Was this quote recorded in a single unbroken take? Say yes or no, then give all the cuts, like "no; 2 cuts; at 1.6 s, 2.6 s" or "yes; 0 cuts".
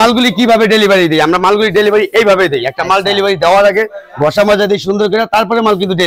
yes; 0 cuts